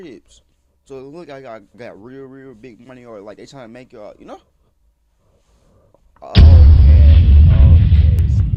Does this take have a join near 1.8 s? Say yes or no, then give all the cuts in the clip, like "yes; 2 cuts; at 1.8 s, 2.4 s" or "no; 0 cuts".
no; 0 cuts